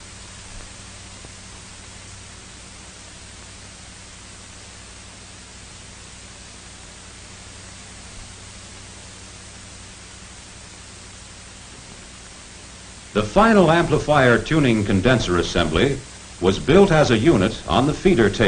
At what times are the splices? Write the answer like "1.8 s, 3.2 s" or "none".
3.0 s

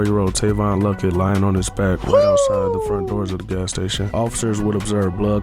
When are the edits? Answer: none

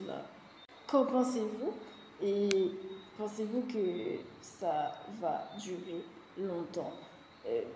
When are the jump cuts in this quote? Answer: 0.9 s

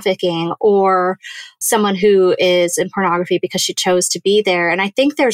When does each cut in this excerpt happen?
1.6 s

